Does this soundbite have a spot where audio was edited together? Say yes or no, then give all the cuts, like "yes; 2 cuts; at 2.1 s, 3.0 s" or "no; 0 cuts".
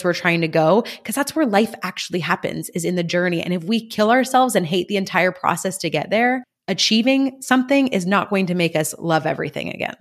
no; 0 cuts